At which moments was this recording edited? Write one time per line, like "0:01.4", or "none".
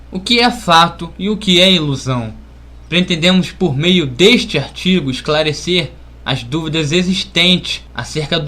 0:05.5